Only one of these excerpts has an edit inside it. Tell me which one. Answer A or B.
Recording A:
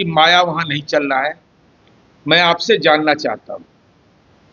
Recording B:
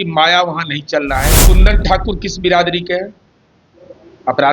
B